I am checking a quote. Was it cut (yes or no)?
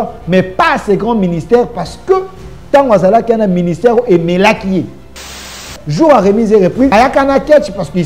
yes